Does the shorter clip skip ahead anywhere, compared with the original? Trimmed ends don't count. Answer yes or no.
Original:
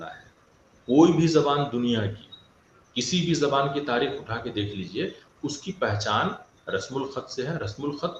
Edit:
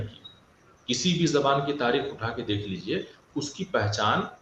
no